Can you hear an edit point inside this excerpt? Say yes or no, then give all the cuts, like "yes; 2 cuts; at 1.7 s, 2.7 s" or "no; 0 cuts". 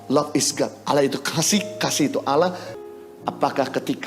yes; 1 cut; at 2.8 s